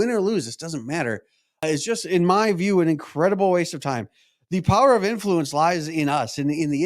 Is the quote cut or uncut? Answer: cut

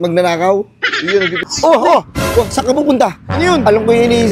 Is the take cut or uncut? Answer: cut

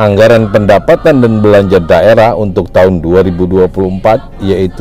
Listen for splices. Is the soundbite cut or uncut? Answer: uncut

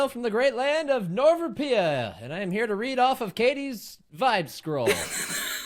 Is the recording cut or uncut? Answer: uncut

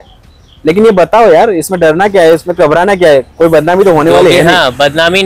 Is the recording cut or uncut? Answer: uncut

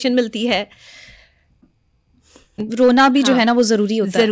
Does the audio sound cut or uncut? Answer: cut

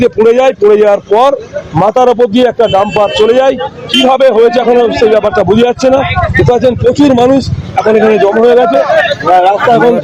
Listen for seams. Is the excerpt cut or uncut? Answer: uncut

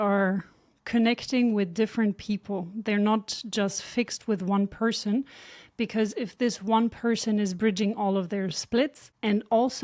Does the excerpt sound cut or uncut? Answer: uncut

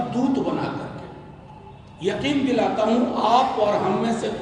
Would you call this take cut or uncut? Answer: uncut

